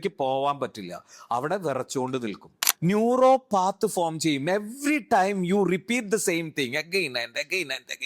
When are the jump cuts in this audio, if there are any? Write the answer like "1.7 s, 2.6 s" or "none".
2.6 s